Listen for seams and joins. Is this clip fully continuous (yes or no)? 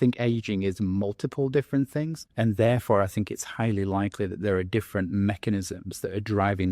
no